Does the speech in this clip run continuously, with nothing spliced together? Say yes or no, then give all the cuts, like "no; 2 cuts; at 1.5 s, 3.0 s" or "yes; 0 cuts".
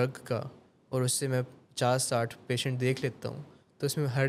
yes; 0 cuts